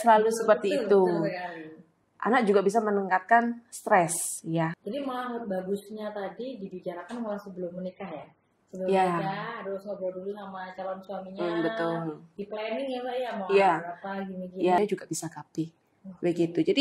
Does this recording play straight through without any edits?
no; 2 cuts; at 4.8 s, 14.8 s

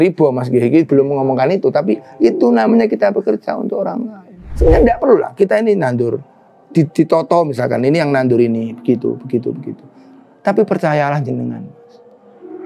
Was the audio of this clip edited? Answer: yes; 1 cut; at 4.4 s

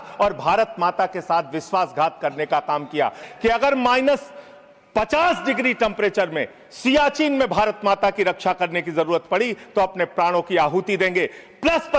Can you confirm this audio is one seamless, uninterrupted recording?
no; 1 cut; at 3.2 s

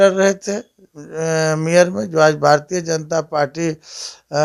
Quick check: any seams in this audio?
no; 0 cuts

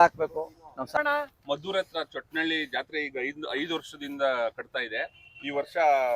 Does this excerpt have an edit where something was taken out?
yes; 1 cut; at 1.0 s

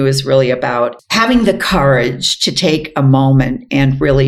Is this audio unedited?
no; 1 cut; at 1.0 s

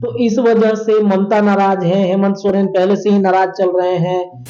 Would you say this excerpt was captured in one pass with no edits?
yes; 0 cuts

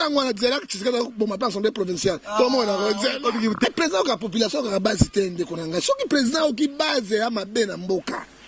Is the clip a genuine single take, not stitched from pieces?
no; 1 cut; at 3.6 s

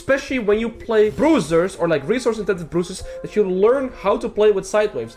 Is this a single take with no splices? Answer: yes; 0 cuts

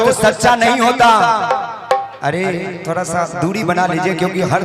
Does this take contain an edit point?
no; 0 cuts

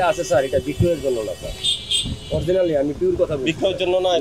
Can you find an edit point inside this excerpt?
no; 0 cuts

